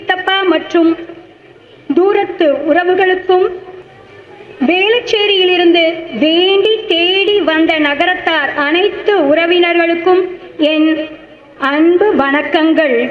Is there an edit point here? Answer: no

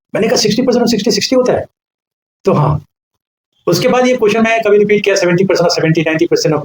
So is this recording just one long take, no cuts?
yes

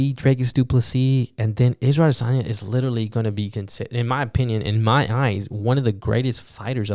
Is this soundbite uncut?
yes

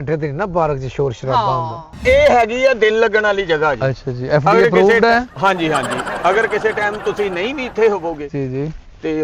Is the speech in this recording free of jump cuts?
no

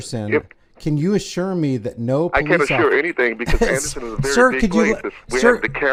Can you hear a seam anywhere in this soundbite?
no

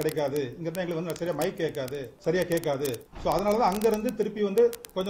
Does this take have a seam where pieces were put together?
yes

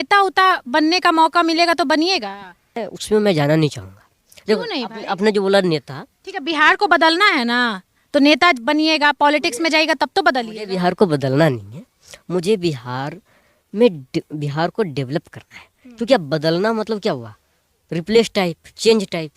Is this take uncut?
no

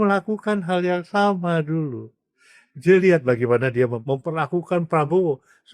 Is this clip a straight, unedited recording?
no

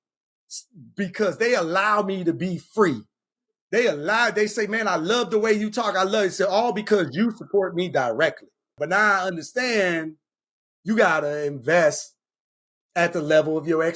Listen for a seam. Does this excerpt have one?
yes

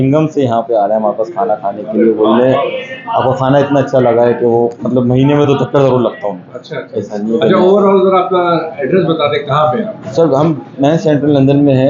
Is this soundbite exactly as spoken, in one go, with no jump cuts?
yes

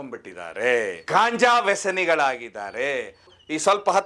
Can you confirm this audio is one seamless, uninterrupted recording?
no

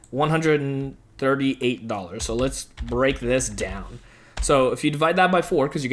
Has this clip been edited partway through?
no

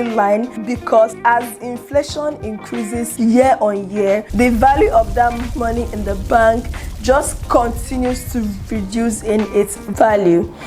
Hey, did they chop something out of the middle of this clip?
yes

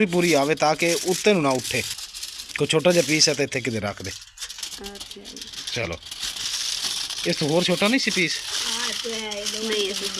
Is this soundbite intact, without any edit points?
no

